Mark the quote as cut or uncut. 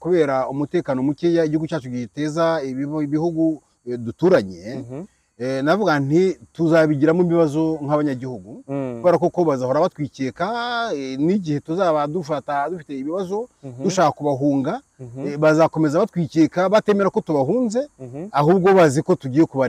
uncut